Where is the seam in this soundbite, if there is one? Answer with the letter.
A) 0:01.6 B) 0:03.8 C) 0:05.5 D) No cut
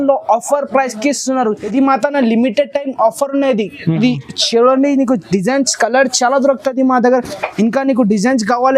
A